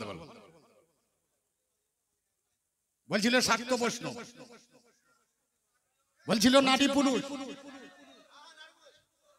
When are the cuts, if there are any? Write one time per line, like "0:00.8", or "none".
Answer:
none